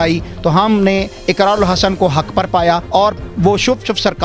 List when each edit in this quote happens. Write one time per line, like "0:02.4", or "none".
0:02.8